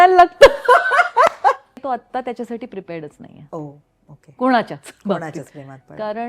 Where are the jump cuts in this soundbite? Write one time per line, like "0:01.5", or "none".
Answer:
0:01.8